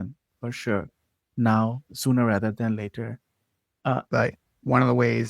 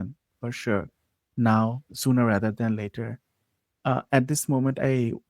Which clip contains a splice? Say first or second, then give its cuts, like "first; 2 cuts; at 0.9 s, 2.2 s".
first; 1 cut; at 4.0 s